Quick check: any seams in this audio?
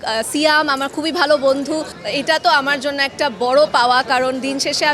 yes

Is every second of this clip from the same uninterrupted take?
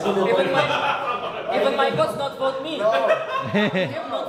yes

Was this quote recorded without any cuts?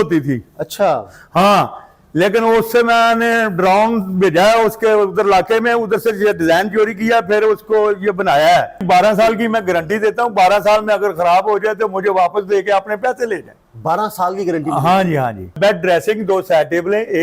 no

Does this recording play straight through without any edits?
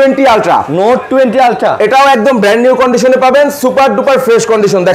yes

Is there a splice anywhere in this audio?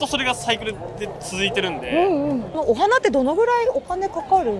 yes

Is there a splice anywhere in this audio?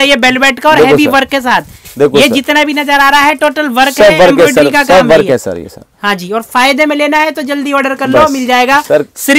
no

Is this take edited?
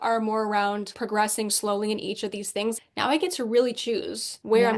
yes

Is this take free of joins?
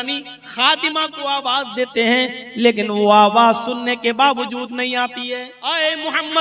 no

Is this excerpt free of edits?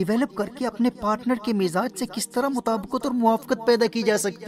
yes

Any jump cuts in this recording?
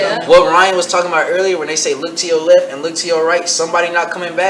no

